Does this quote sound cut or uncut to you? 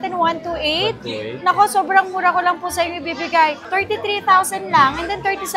uncut